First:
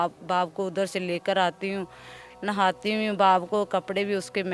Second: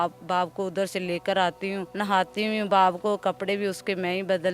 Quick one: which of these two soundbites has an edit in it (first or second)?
second